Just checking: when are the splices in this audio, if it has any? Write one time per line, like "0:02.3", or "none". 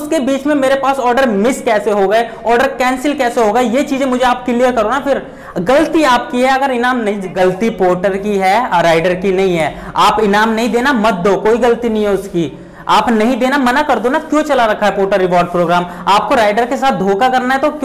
0:07.3